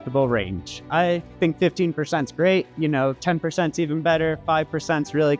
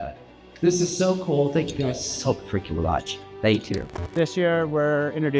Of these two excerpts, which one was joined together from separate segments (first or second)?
second